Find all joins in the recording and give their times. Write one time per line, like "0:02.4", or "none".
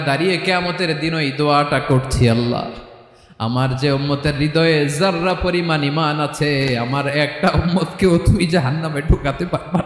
none